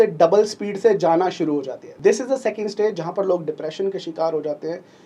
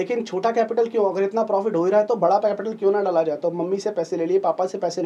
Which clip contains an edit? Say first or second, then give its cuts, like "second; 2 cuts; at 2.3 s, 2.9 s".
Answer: first; 1 cut; at 1.8 s